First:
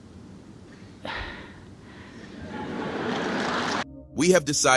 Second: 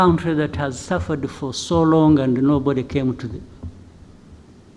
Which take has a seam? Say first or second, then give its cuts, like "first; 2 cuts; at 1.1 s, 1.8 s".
first; 1 cut; at 3.8 s